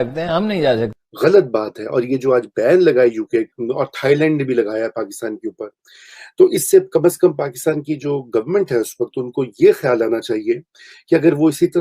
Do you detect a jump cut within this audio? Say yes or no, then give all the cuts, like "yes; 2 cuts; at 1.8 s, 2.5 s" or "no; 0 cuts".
yes; 1 cut; at 1.0 s